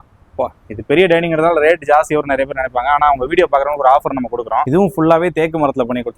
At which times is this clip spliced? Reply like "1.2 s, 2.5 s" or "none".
4.7 s